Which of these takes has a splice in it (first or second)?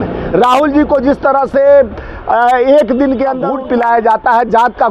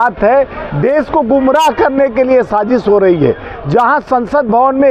first